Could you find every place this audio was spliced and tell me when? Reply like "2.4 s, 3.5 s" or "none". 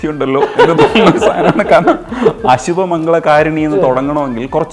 none